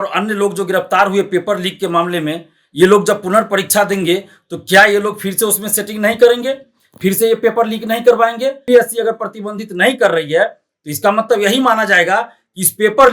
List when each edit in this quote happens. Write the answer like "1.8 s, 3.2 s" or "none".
8.6 s